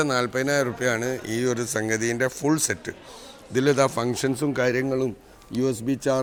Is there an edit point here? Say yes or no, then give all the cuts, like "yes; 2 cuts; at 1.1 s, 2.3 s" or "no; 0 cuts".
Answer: no; 0 cuts